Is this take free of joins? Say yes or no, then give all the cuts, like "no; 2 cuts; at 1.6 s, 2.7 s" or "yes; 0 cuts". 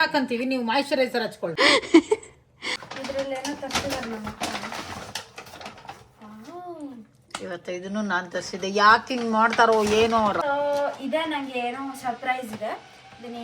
no; 3 cuts; at 1.4 s, 2.8 s, 10.4 s